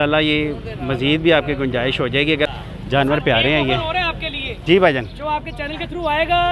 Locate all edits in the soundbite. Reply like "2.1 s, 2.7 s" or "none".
2.5 s